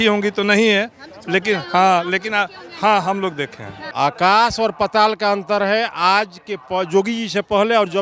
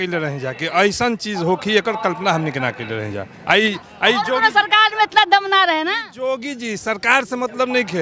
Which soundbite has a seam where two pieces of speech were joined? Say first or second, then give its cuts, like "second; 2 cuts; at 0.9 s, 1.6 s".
first; 1 cut; at 3.8 s